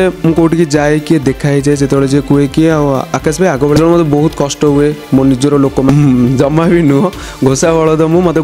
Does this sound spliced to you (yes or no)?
yes